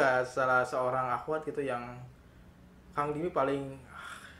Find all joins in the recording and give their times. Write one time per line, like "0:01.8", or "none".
none

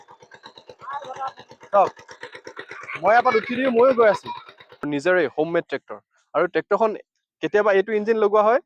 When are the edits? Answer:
none

